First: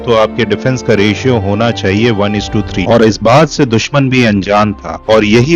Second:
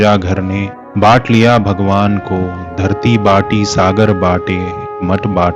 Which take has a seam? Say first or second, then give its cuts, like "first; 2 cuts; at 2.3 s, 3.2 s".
first; 1 cut; at 2.8 s